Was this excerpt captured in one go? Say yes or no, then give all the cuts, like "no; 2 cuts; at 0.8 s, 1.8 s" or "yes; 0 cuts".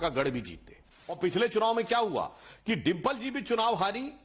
no; 1 cut; at 1.2 s